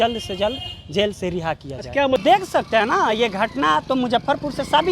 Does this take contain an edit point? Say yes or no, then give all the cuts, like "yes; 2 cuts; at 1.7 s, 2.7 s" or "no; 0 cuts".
yes; 1 cut; at 2.2 s